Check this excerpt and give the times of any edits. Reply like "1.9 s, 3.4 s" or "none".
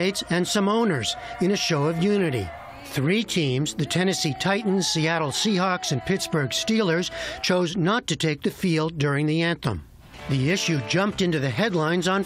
7.5 s